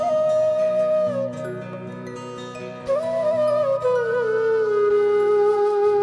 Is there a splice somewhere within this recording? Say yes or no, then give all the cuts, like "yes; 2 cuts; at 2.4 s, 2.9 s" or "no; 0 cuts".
no; 0 cuts